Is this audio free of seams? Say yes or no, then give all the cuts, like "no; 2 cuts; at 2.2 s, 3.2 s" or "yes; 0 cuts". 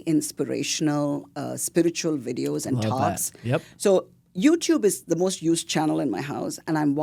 yes; 0 cuts